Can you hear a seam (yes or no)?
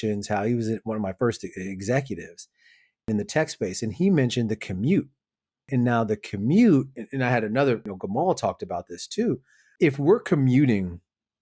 yes